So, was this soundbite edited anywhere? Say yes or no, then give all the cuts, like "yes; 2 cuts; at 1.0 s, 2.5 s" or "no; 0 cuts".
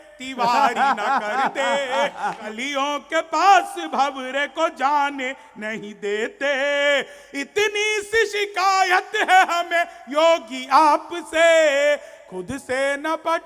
yes; 1 cut; at 2.4 s